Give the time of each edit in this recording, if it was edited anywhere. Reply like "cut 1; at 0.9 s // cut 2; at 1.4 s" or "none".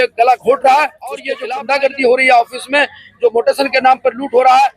cut 1; at 1.3 s